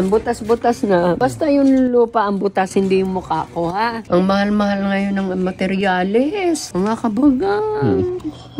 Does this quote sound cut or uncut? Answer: cut